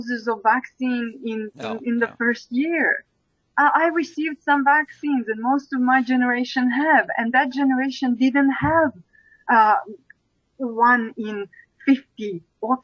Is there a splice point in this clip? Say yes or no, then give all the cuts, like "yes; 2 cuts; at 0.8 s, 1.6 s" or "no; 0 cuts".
no; 0 cuts